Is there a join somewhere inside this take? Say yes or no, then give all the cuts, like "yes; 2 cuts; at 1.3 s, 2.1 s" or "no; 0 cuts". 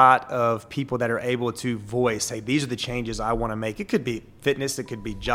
no; 0 cuts